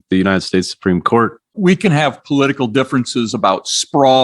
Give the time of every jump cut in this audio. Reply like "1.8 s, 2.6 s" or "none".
1.5 s